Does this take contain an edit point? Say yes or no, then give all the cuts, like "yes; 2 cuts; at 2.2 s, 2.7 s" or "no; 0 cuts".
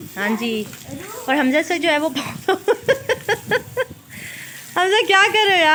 no; 0 cuts